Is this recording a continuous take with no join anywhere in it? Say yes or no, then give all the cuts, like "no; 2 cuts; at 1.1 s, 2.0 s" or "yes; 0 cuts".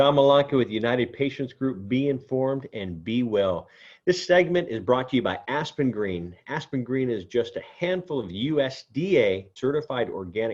no; 1 cut; at 9.5 s